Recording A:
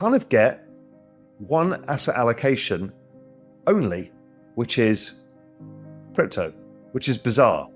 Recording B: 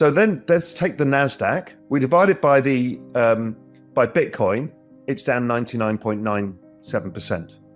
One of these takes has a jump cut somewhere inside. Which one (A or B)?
B